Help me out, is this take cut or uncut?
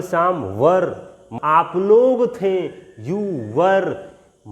cut